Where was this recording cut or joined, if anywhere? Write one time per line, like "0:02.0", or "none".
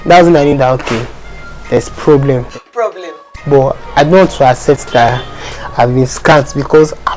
none